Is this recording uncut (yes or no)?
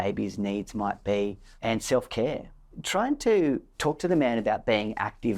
no